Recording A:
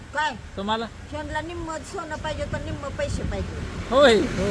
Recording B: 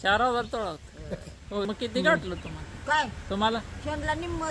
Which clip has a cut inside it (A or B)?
B